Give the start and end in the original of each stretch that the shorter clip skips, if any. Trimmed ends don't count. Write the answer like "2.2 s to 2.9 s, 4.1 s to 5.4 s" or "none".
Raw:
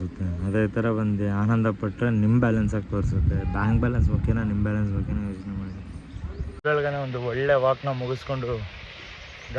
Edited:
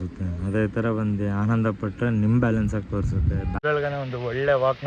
3.5 s to 6.5 s